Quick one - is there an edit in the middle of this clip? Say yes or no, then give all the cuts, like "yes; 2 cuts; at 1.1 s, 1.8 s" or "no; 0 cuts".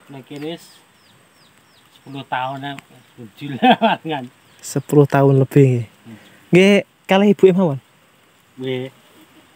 no; 0 cuts